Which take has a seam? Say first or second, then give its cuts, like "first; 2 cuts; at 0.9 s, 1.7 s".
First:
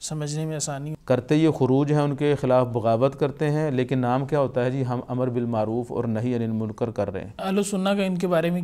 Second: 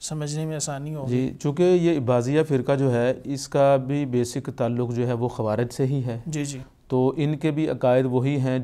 first; 2 cuts; at 0.9 s, 7.4 s